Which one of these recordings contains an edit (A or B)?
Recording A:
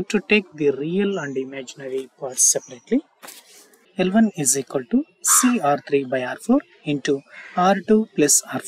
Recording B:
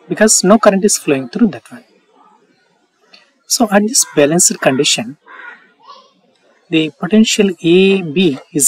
A